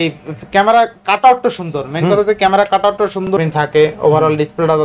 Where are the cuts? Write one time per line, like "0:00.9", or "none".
0:03.3

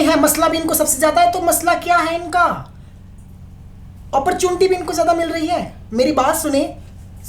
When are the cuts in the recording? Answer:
none

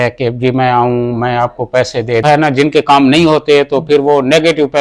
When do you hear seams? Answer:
0:02.2

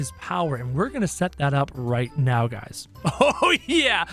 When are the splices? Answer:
0:02.8

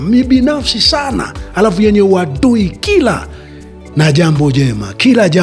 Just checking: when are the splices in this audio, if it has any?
none

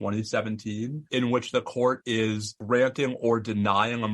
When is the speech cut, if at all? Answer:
0:01.0
0:02.5

